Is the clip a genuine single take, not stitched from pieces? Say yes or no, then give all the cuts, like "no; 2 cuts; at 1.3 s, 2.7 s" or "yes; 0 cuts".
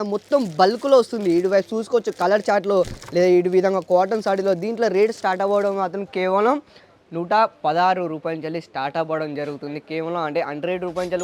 yes; 0 cuts